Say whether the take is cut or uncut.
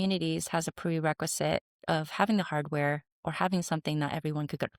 uncut